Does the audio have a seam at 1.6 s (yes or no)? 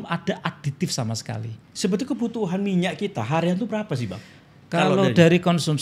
yes